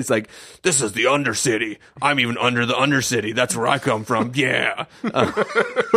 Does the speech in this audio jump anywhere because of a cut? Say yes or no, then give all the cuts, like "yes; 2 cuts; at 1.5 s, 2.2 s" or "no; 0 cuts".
no; 0 cuts